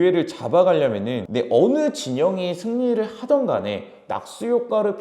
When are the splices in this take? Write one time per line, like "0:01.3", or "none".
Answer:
0:01.3